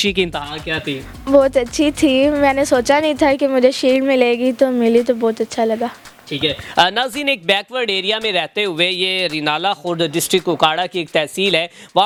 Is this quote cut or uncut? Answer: uncut